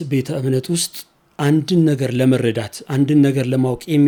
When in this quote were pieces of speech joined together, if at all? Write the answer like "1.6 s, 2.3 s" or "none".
none